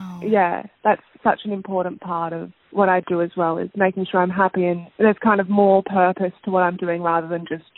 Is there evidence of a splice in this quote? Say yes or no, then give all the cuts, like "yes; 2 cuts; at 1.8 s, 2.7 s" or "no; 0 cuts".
yes; 1 cut; at 4.9 s